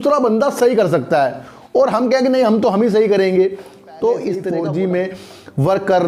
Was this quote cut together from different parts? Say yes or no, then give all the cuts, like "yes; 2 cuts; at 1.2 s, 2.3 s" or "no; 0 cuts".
yes; 1 cut; at 4.4 s